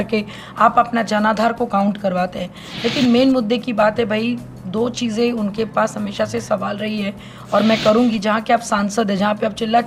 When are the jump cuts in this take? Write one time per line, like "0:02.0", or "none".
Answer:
none

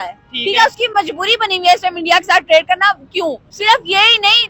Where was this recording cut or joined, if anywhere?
0:03.5

